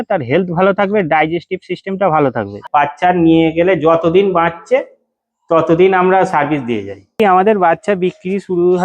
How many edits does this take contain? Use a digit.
2